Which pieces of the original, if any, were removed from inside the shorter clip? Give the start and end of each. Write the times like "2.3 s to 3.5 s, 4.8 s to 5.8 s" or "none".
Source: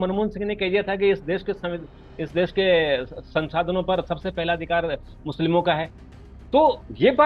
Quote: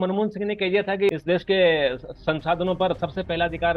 1.1 s to 2.2 s